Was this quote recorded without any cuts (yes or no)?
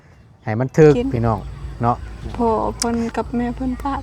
no